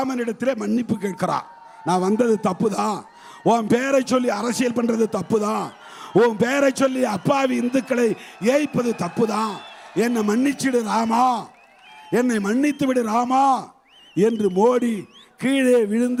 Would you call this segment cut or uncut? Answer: uncut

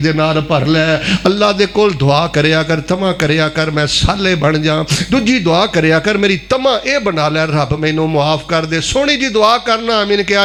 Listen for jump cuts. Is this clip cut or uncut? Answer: uncut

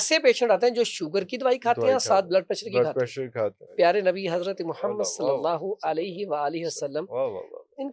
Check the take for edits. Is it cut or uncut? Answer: cut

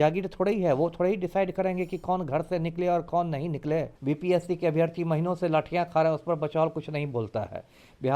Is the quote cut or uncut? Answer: cut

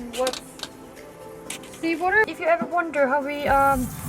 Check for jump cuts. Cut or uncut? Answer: cut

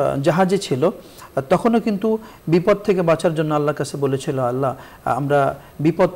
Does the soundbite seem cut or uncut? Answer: uncut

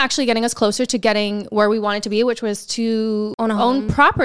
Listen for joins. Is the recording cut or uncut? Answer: uncut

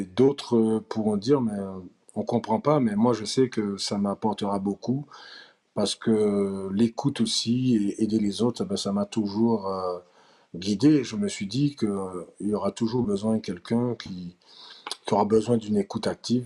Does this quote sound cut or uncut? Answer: uncut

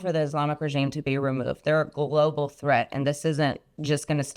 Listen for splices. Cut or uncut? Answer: uncut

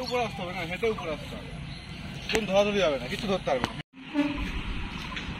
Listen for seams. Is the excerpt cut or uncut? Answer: uncut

